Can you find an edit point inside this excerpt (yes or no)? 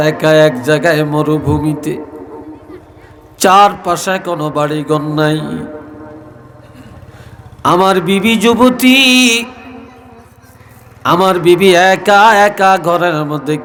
no